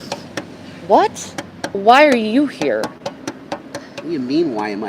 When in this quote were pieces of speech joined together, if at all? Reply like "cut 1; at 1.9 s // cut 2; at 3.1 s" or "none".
cut 1; at 1.8 s